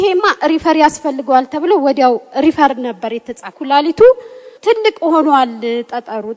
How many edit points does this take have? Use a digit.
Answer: 2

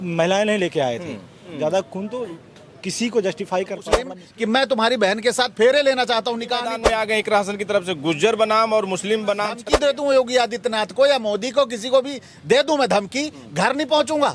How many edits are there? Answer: 4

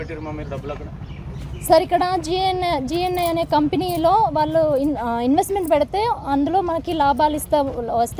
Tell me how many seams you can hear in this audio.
0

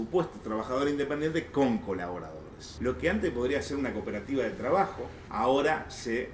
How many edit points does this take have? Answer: 2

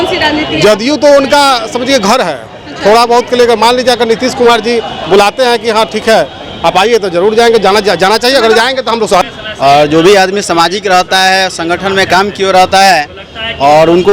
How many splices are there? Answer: 1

